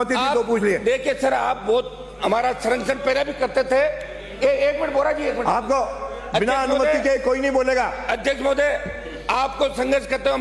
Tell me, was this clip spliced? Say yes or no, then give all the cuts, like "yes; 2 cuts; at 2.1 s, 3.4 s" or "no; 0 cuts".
no; 0 cuts